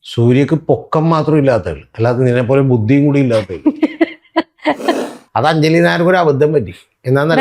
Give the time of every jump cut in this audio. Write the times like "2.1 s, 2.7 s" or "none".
5.1 s